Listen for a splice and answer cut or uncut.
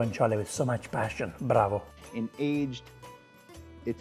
uncut